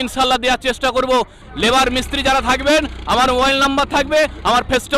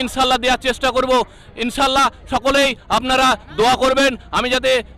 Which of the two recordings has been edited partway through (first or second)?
first